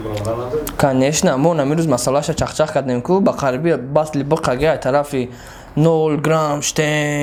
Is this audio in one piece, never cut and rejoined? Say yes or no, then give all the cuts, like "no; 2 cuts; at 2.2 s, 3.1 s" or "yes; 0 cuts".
yes; 0 cuts